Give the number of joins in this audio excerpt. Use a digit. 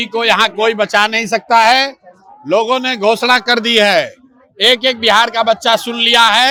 0